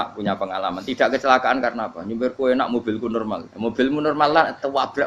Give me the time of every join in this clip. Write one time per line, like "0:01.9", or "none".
0:03.5